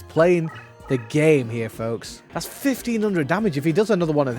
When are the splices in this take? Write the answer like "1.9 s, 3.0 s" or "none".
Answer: 2.1 s